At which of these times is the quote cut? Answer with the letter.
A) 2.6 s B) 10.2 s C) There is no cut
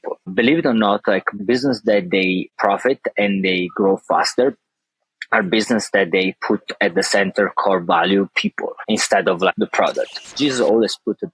B